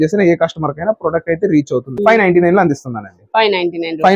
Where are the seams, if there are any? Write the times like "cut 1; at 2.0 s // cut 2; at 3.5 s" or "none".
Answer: cut 1; at 1.9 s

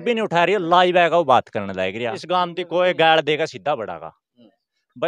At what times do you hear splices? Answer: cut 1; at 2.2 s

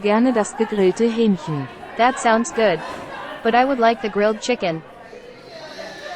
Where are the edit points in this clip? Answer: cut 1; at 4.8 s

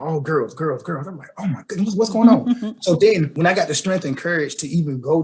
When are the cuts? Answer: cut 1; at 3.3 s

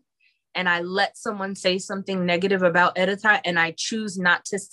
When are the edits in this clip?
none

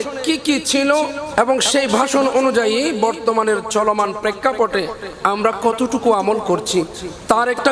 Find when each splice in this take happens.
cut 1; at 1.2 s

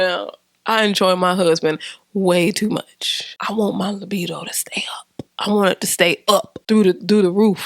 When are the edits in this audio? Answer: cut 1; at 6.6 s

